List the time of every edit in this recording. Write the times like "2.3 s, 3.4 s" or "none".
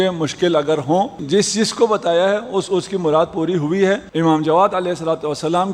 1.2 s, 4.1 s